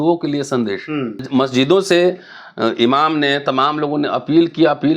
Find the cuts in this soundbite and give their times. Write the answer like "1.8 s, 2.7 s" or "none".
1.3 s